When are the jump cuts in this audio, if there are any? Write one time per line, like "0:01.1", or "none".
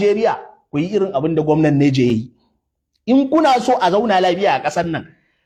none